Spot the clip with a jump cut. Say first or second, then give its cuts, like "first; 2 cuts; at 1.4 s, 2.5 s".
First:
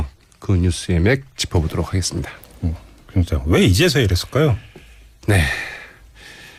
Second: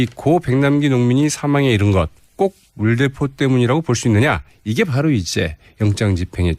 second; 1 cut; at 4.2 s